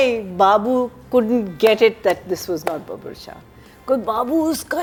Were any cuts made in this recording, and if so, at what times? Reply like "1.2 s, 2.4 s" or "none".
none